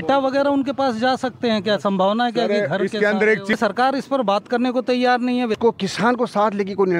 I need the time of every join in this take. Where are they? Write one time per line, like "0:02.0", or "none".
0:03.6
0:05.5